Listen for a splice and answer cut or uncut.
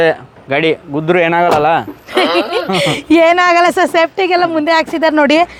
uncut